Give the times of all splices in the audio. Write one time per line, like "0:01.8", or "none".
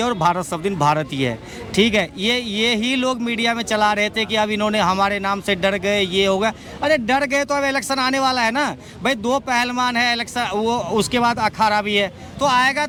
none